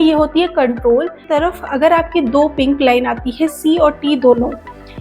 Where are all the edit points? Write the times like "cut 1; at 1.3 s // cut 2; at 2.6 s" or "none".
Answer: cut 1; at 1.3 s